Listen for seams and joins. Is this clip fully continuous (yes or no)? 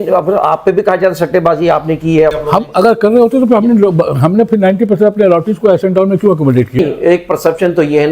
no